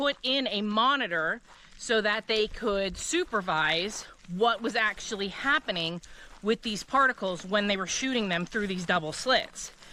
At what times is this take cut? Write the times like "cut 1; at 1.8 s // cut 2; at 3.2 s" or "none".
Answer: none